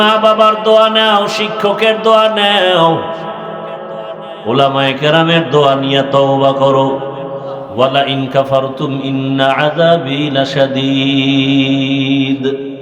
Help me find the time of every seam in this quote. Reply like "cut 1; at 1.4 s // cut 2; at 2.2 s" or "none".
cut 1; at 7.6 s